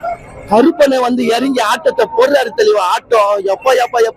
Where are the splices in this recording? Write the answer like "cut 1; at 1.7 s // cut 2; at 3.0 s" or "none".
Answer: none